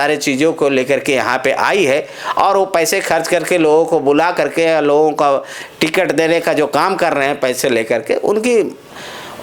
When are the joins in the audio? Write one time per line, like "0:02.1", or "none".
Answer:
none

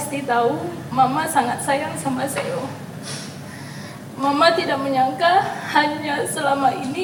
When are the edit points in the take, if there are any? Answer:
none

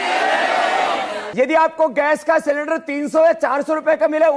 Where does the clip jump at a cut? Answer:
0:01.2

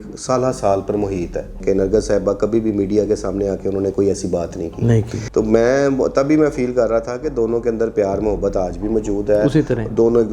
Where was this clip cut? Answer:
0:01.6
0:05.2

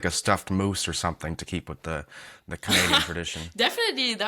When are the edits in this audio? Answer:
none

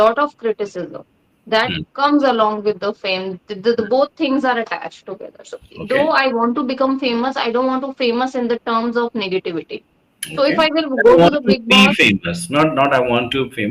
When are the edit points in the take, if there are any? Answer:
none

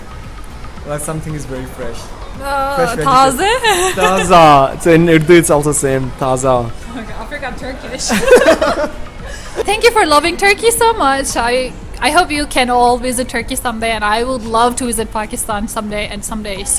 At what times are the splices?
0:09.6

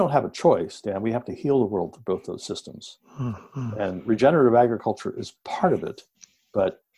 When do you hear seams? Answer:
none

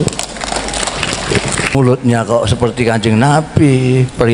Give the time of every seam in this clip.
0:01.7

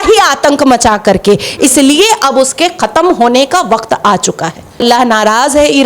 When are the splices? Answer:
0:04.8

